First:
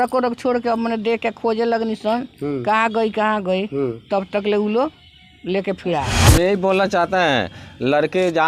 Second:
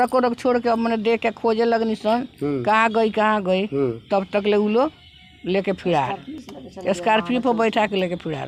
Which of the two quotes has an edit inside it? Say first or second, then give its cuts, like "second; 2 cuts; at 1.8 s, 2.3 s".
first; 1 cut; at 6.1 s